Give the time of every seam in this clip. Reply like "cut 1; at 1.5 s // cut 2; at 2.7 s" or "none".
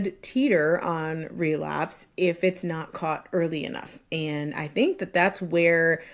none